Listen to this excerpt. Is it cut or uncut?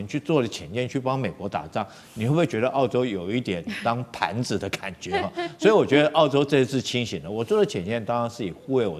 uncut